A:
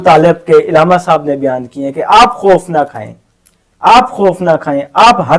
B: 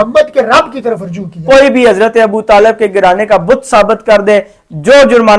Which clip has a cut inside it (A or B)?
B